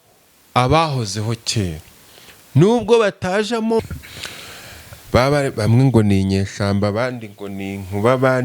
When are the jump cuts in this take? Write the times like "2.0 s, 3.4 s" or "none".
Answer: 3.8 s